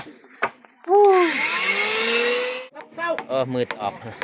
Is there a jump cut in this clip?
yes; 1 cut; at 2.5 s

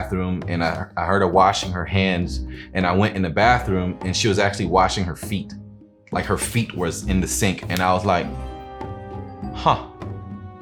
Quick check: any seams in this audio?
no; 0 cuts

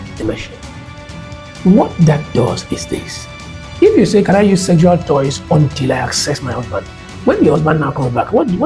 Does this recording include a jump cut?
no; 0 cuts

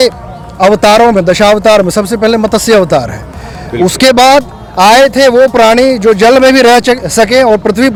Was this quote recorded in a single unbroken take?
yes; 0 cuts

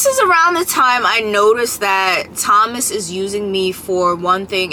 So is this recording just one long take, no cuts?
yes; 0 cuts

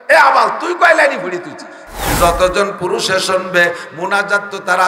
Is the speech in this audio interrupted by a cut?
yes; 1 cut; at 2.0 s

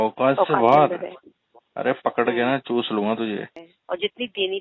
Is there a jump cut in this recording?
yes; 1 cut; at 3.7 s

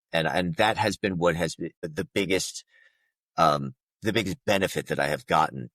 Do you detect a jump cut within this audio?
yes; 1 cut; at 1.8 s

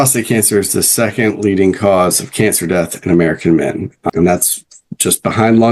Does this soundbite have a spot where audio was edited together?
yes; 1 cut; at 4.0 s

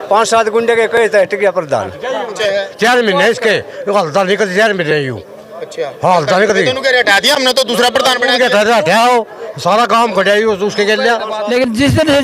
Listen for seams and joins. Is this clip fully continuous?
no; 2 cuts; at 2.4 s, 11.3 s

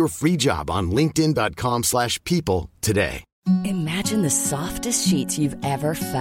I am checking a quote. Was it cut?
yes; 1 cut; at 3.3 s

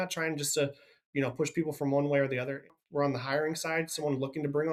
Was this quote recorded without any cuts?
yes; 0 cuts

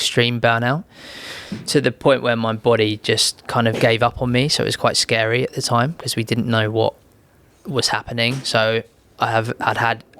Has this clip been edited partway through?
no; 0 cuts

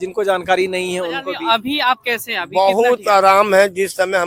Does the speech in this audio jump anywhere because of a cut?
yes; 1 cut; at 1.3 s

